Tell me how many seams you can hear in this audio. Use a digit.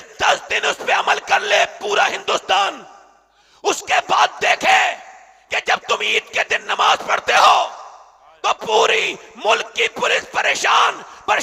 0